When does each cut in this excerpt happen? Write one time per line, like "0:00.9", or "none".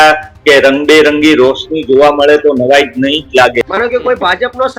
0:03.7